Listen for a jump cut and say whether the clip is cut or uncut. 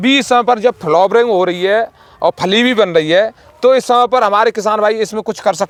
uncut